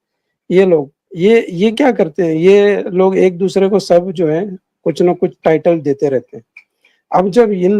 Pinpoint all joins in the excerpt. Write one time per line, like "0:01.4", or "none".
none